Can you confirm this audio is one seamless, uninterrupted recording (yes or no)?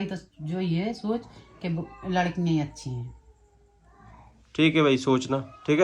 yes